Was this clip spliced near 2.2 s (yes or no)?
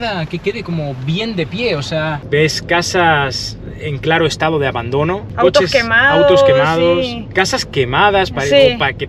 yes